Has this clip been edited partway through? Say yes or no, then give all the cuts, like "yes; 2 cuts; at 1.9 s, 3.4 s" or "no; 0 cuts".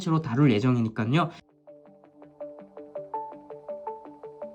yes; 1 cut; at 1.4 s